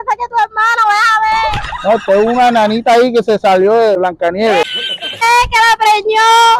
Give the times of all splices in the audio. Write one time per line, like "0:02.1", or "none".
0:04.0
0:05.2